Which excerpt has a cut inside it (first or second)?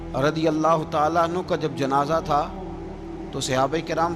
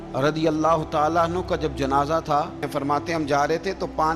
second